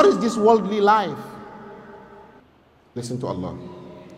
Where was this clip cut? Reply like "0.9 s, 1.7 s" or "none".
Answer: 2.4 s